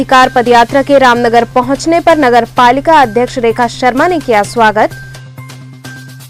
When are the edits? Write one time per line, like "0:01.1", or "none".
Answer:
none